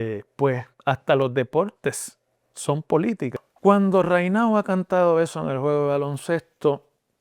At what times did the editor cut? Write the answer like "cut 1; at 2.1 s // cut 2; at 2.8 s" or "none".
cut 1; at 3.4 s